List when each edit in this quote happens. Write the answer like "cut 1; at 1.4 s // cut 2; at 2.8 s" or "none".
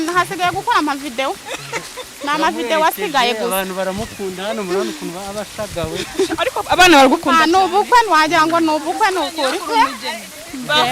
none